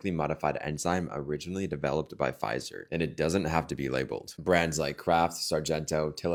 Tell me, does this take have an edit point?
no; 0 cuts

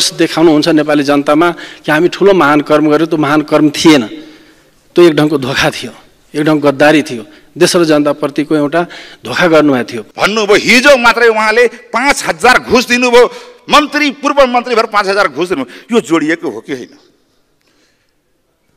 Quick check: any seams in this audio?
yes; 1 cut; at 10.0 s

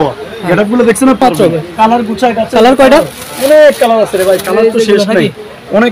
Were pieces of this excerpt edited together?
no; 0 cuts

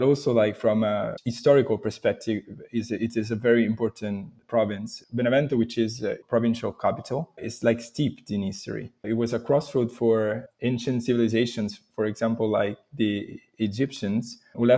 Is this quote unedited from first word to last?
yes; 0 cuts

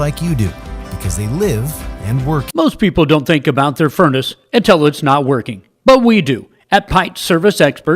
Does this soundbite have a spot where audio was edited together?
yes; 1 cut; at 2.5 s

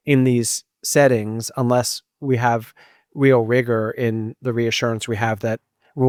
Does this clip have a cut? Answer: no; 0 cuts

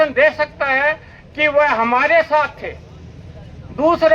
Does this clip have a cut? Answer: no; 0 cuts

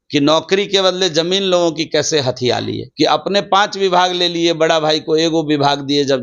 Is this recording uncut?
no; 1 cut; at 2.8 s

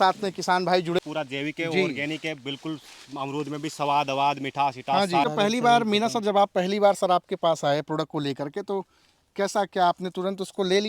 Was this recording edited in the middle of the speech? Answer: yes; 2 cuts; at 1.0 s, 5.2 s

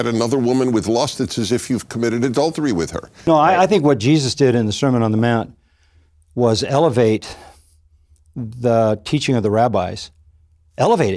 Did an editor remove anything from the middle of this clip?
yes; 1 cut; at 3.3 s

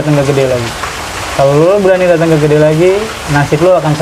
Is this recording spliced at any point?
no; 0 cuts

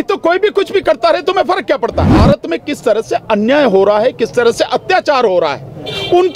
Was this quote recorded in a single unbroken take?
no; 1 cut; at 2.1 s

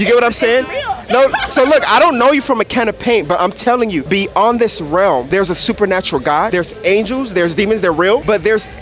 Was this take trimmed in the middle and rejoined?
no; 0 cuts

